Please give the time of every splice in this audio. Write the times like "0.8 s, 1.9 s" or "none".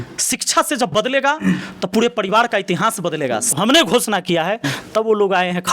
3.5 s